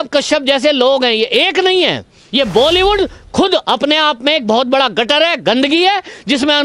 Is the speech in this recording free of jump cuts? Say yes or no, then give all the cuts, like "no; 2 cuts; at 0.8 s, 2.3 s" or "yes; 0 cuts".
no; 1 cut; at 2.2 s